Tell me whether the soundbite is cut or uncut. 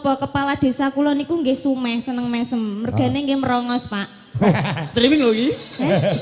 uncut